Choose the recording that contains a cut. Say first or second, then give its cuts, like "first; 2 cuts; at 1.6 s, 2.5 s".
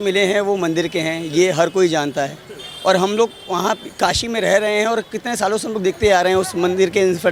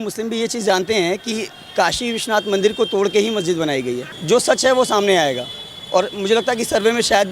second; 1 cut; at 4.1 s